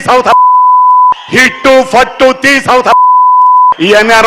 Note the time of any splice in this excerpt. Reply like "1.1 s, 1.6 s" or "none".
1.0 s